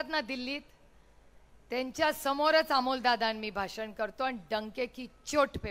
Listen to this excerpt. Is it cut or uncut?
uncut